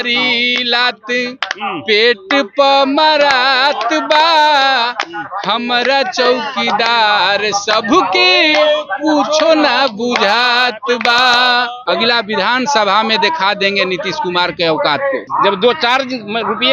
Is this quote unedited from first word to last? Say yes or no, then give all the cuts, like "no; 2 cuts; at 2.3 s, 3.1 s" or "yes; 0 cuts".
no; 2 cuts; at 11.7 s, 15.3 s